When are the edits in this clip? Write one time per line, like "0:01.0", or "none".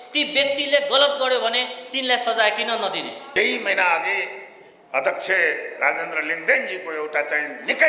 0:03.2